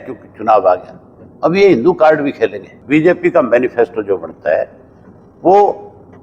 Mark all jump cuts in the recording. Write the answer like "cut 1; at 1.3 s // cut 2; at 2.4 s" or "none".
cut 1; at 2.7 s